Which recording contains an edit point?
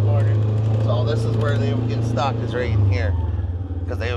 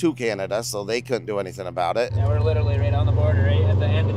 second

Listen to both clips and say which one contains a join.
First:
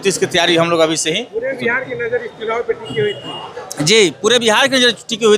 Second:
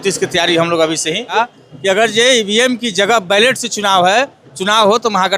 second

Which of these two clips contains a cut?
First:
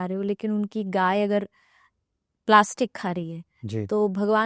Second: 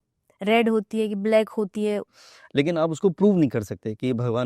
second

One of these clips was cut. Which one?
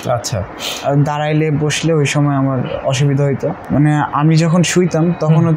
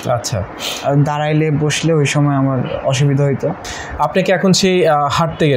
second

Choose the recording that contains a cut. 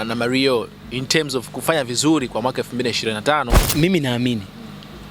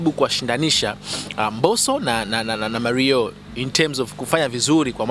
first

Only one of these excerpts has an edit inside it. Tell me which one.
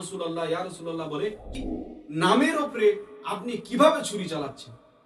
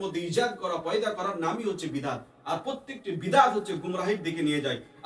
first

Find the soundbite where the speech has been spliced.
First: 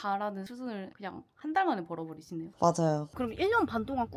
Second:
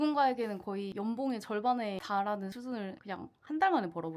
first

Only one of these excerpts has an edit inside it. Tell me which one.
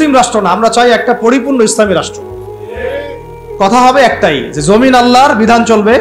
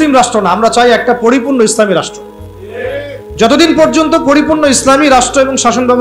first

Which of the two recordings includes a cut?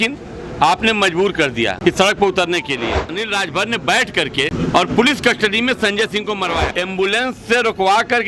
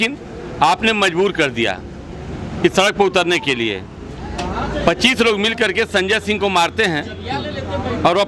first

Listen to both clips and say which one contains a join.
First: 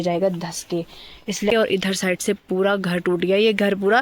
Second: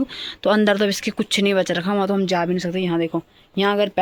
first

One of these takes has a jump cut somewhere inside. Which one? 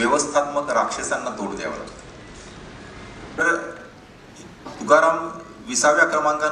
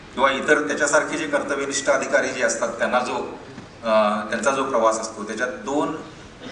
first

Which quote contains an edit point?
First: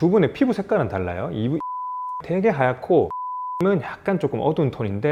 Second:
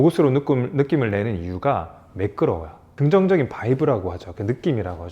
second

